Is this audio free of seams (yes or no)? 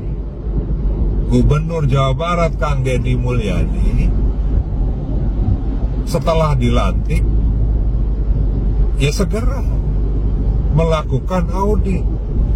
yes